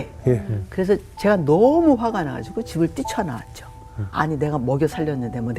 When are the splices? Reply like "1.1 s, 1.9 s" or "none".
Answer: 4.1 s